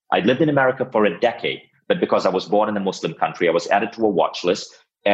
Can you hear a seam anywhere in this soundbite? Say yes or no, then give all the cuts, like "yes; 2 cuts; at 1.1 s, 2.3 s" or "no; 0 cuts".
no; 0 cuts